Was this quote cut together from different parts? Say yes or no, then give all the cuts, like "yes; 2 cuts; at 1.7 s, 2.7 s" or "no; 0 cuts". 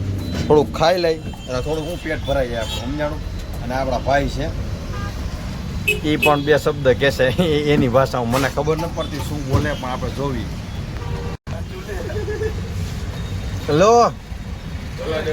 no; 0 cuts